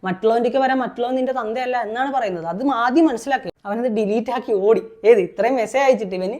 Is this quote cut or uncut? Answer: cut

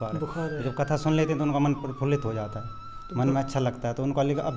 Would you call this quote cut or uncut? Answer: uncut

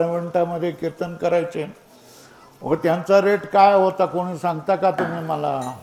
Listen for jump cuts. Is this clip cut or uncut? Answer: uncut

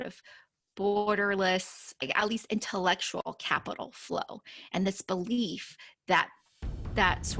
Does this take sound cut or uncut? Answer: cut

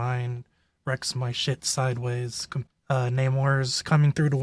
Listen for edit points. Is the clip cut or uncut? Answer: cut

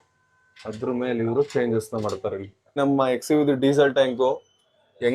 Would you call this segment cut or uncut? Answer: cut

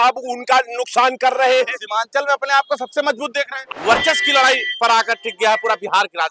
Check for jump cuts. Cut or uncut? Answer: cut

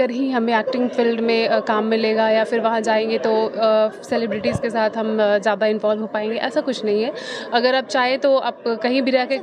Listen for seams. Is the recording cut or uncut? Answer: uncut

